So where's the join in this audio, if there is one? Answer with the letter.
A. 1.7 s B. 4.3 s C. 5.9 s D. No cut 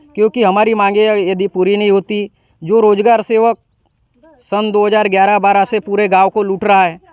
D